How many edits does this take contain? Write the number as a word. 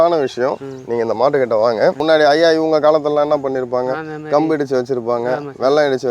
one